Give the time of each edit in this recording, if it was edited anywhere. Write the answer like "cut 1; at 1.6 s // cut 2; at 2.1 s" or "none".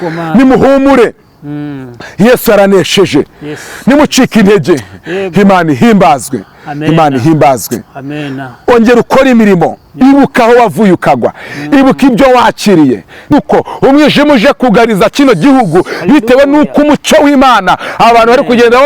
cut 1; at 13.3 s